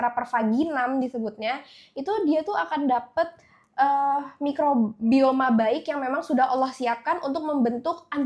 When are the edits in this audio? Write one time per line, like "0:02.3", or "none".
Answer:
none

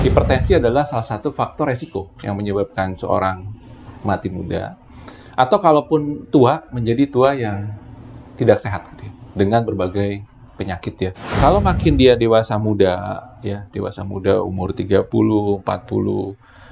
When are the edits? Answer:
0:11.3

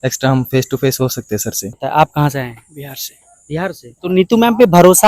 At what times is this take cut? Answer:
0:01.7
0:03.9

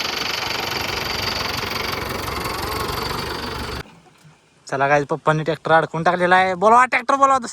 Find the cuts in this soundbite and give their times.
0:03.8

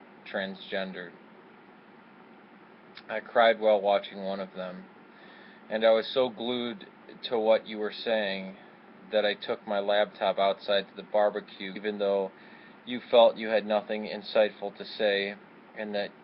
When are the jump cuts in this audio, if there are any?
none

